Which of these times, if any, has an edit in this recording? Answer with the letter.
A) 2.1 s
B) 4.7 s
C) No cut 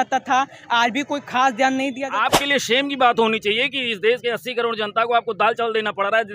A